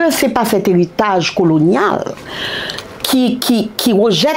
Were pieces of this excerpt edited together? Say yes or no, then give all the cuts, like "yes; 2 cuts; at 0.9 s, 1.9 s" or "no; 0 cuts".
no; 0 cuts